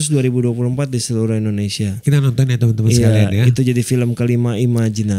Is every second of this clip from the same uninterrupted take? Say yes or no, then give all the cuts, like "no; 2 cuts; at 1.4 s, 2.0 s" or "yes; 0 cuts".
yes; 0 cuts